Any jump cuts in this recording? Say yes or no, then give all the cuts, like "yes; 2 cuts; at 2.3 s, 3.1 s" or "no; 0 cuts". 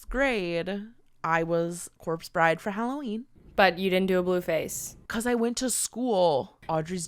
no; 0 cuts